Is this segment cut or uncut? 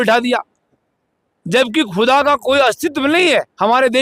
uncut